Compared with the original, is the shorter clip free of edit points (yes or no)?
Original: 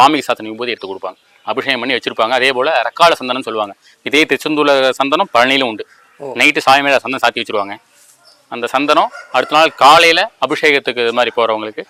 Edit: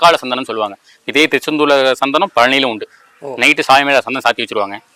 yes